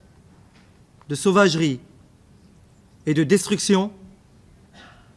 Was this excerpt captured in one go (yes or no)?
yes